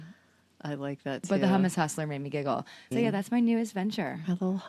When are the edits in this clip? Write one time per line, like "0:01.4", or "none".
0:02.8